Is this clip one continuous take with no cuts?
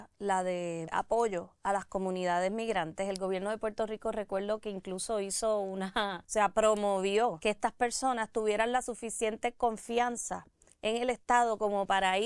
no; 3 cuts; at 0.9 s, 6.2 s, 7.4 s

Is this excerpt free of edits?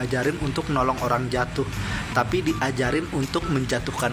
yes; 0 cuts

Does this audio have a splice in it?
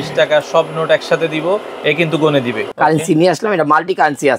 yes; 1 cut; at 2.6 s

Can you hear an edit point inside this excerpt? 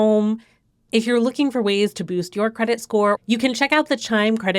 yes; 1 cut; at 3.2 s

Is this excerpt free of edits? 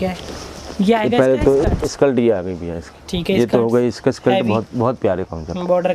yes; 0 cuts

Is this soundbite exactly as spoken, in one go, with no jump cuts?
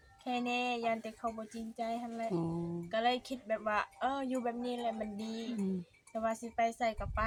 yes; 0 cuts

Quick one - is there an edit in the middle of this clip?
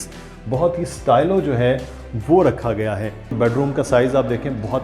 yes; 1 cut; at 3.3 s

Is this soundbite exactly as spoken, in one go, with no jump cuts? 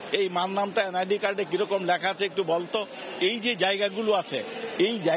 yes; 0 cuts

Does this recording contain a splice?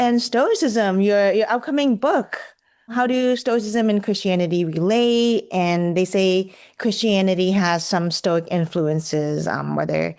no; 0 cuts

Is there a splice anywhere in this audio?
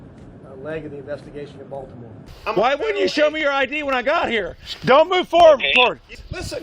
yes; 1 cut; at 2.3 s

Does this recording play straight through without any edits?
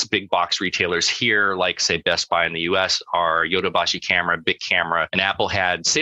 no; 2 cuts; at 1.8 s, 5.1 s

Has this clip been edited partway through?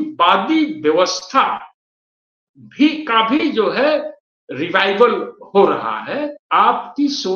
yes; 1 cut; at 6.4 s

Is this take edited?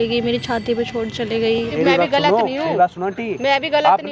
yes; 1 cut; at 1.7 s

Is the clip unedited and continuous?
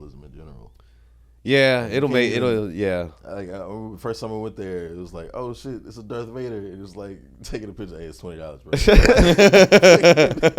yes; 0 cuts

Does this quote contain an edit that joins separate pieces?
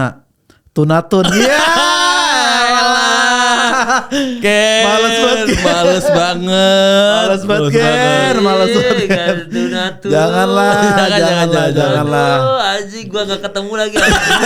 no; 0 cuts

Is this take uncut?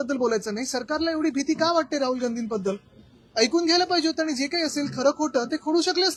yes; 0 cuts

